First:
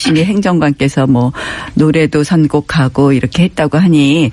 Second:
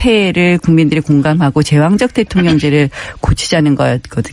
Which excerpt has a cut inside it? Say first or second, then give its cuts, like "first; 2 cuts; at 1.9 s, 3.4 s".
first; 1 cut; at 2.7 s